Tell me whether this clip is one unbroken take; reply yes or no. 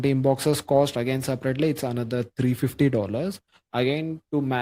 yes